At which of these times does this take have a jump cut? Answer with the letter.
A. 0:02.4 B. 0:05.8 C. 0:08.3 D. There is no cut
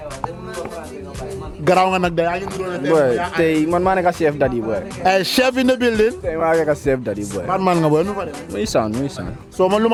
D